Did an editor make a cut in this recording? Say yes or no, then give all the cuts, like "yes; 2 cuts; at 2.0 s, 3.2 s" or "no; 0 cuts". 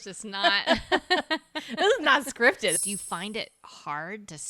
yes; 1 cut; at 2.7 s